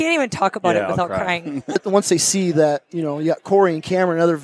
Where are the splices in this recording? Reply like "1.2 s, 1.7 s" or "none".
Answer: 1.8 s